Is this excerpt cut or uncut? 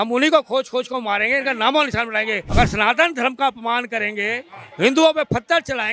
cut